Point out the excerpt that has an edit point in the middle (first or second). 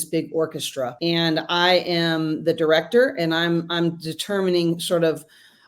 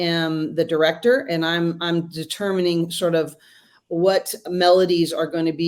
first